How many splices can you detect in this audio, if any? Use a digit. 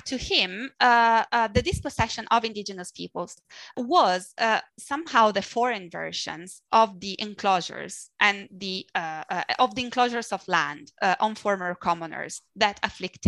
1